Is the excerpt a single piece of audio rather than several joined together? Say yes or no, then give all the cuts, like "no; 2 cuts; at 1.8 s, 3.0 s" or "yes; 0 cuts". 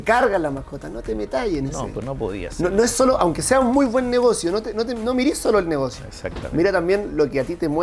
yes; 0 cuts